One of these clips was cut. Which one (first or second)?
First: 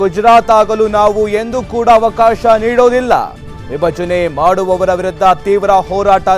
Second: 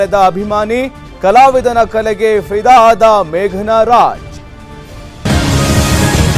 second